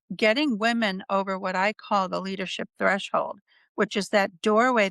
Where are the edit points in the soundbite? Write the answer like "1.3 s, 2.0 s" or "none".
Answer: none